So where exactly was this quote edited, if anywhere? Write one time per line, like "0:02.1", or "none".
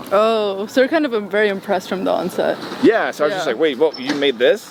none